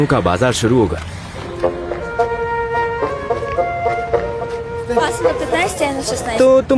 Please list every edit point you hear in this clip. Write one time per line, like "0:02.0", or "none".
none